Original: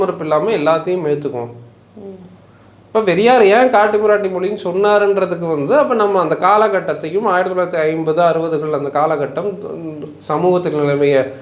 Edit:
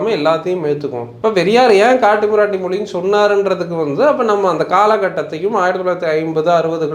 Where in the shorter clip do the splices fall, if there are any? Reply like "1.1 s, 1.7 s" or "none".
1.1 s